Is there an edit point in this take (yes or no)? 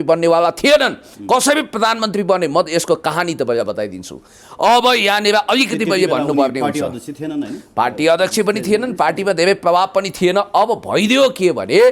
no